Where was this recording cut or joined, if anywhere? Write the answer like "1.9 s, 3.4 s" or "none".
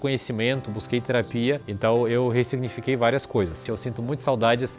3.6 s